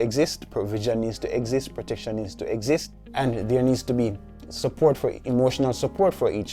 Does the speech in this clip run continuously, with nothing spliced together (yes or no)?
no